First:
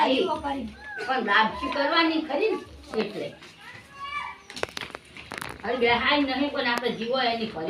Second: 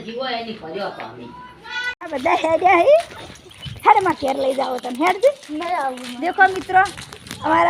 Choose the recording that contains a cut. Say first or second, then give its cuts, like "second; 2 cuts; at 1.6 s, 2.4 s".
second; 1 cut; at 2.1 s